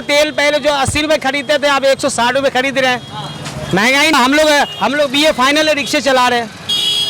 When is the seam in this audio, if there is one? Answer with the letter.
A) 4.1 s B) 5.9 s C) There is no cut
A